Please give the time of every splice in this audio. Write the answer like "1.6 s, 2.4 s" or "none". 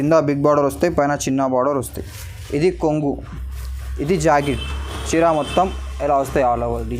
none